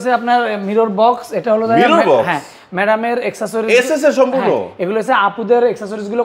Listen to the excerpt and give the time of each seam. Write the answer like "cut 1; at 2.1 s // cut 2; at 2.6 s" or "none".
none